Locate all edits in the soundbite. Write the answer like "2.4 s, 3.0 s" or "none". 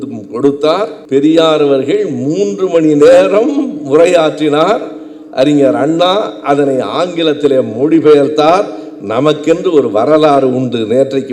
1.0 s